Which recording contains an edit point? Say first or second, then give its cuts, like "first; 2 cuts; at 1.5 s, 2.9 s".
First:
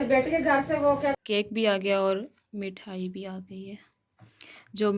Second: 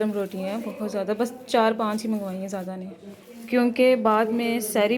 first; 1 cut; at 1.2 s